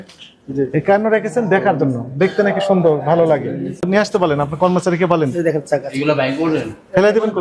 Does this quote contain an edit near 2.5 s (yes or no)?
no